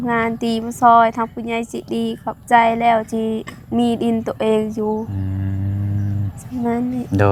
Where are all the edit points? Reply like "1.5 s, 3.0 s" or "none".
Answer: none